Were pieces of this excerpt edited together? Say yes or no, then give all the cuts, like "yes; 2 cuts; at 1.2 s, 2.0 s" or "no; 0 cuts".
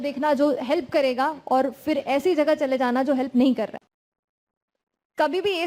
yes; 1 cut; at 3.8 s